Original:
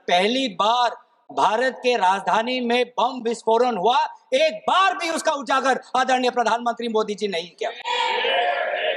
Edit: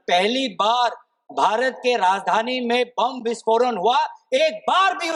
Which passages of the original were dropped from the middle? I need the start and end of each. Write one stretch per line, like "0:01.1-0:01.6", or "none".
none